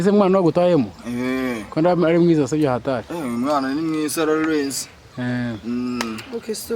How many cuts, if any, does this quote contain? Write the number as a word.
zero